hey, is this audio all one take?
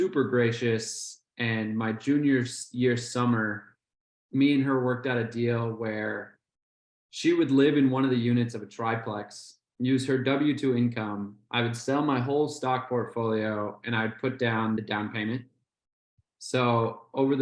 no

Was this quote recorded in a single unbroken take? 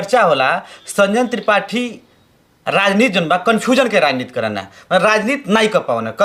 yes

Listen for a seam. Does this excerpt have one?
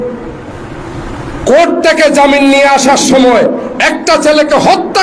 no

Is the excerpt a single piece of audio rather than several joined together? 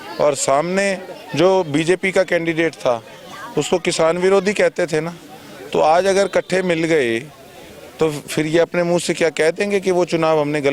yes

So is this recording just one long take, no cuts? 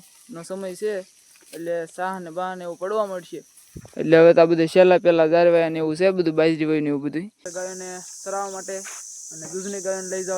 no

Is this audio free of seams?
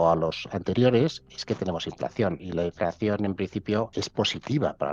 no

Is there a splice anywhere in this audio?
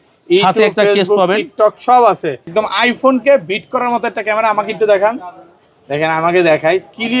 yes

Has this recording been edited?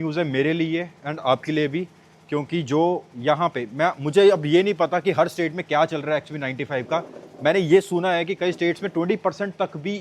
no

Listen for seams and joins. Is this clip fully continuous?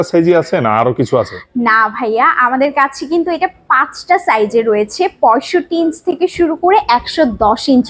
yes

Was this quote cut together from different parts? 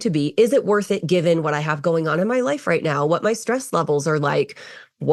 no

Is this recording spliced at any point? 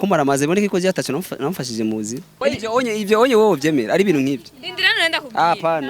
yes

